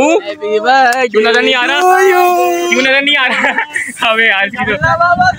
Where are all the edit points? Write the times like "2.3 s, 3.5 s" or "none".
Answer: none